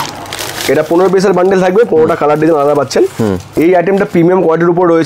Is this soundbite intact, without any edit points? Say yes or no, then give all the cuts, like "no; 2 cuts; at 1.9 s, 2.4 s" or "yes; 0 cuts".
no; 1 cut; at 3.5 s